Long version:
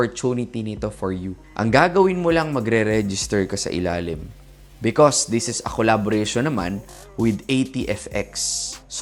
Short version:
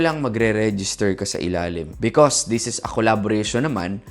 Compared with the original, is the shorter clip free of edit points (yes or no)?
no